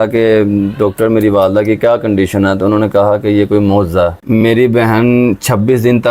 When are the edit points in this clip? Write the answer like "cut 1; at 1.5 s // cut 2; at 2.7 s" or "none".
cut 1; at 4.4 s